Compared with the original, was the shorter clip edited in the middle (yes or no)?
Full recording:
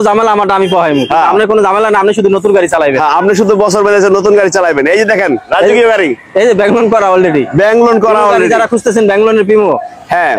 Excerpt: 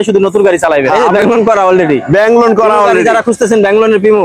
yes